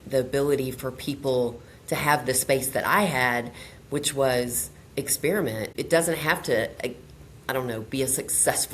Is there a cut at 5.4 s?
no; 0 cuts

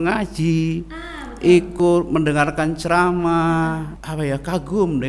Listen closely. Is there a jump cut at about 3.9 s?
yes; 1 cut; at 3.9 s

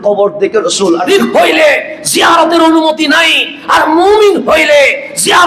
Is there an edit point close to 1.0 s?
yes; 1 cut; at 1.0 s

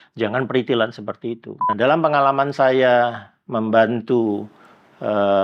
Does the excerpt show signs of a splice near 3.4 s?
no; 1 cut; at 1.7 s

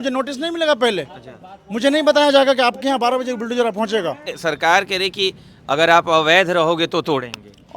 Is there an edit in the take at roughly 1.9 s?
no; 1 cut; at 4.3 s

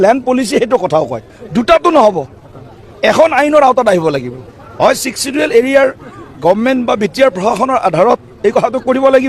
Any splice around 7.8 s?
no; 0 cuts

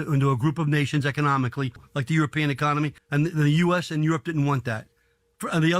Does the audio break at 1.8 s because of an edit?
yes; 2 cuts; at 1.8 s, 3.0 s

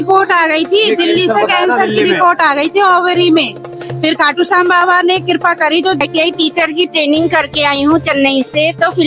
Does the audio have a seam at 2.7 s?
no; 1 cut; at 6.0 s

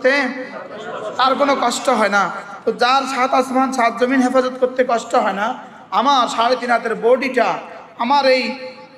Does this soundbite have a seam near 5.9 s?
no; 0 cuts

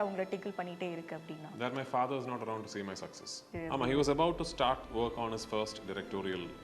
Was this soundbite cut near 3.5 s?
yes; 2 cuts; at 3.5 s, 4.9 s

